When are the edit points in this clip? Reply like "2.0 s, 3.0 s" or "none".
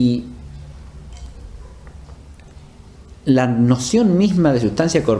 3.4 s